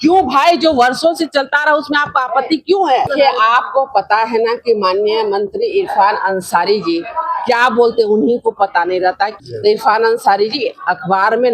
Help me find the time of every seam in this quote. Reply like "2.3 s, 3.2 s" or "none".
3.1 s, 9.4 s